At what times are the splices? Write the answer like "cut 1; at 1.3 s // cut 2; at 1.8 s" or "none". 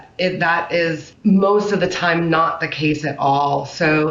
cut 1; at 1.1 s